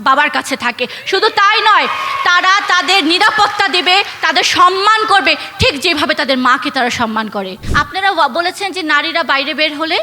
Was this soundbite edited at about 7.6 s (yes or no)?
yes